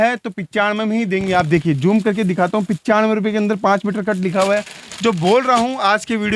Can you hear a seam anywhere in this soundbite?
no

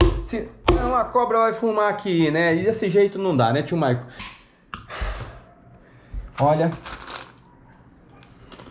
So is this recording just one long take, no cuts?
no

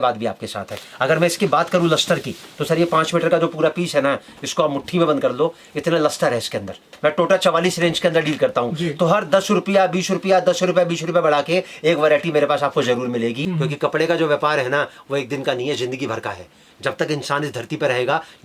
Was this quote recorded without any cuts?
no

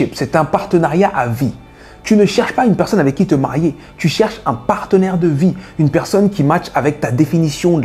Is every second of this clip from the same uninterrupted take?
yes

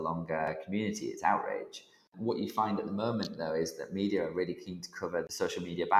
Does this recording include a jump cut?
yes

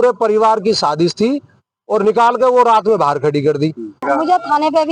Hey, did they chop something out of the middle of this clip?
yes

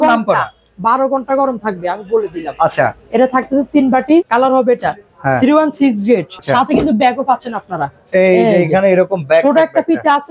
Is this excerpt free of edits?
no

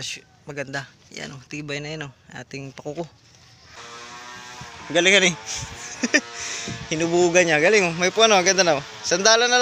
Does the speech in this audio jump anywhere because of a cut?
yes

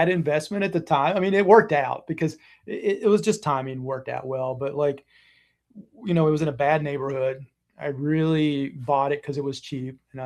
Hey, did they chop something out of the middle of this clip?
no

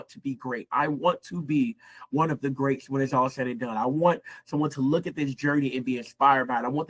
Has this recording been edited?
no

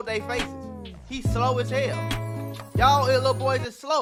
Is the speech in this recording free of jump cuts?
yes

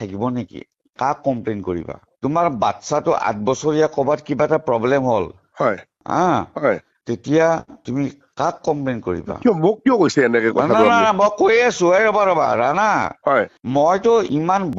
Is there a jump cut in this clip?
no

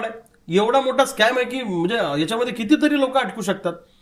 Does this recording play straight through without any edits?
yes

